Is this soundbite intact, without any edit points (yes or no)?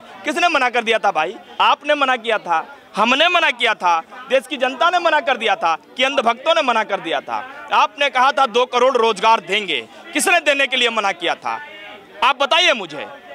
yes